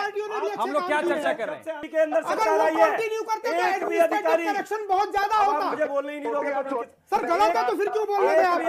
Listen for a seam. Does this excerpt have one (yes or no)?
yes